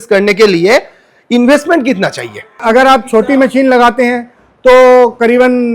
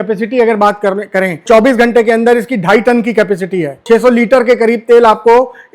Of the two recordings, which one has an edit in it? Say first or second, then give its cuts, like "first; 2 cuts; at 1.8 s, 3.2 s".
second; 1 cut; at 1.4 s